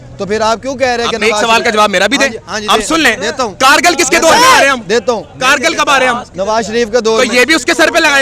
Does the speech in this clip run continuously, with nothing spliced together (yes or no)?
yes